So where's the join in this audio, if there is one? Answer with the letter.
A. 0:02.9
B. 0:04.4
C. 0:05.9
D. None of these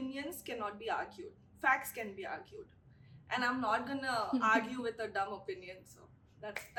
D